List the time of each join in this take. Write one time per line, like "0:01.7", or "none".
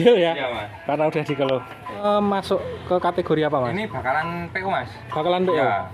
0:02.0

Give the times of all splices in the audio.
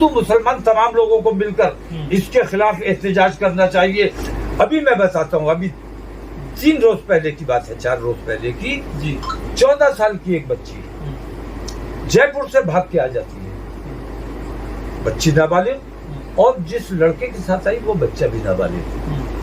0:04.2

